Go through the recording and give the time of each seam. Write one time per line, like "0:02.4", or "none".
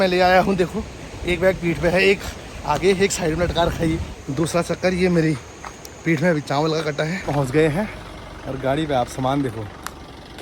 0:04.2
0:07.2